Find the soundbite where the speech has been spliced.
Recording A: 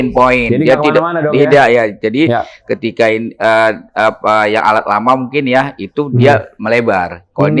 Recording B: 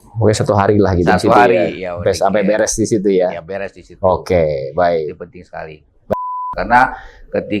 B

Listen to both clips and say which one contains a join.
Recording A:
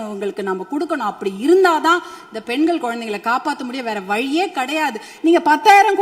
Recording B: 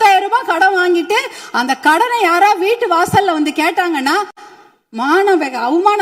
A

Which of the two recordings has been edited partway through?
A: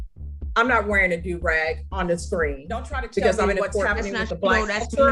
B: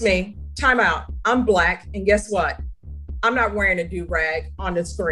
A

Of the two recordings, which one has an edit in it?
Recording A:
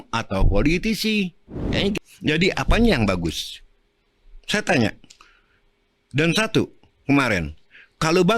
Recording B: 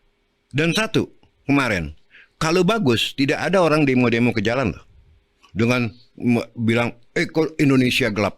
A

